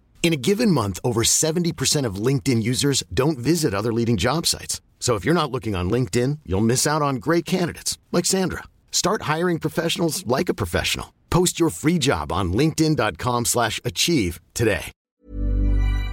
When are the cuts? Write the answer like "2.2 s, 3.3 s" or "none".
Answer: 15.0 s